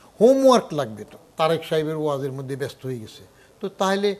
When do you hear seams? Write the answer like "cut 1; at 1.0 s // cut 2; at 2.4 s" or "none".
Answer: cut 1; at 1.2 s